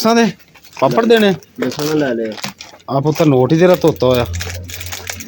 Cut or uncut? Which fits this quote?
uncut